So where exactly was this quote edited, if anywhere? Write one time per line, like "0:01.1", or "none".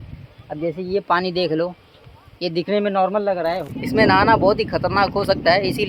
0:03.6